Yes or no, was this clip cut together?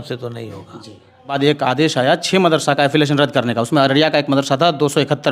yes